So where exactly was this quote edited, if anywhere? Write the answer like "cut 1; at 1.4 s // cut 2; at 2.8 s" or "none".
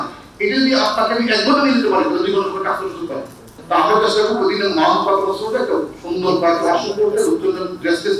cut 1; at 3.6 s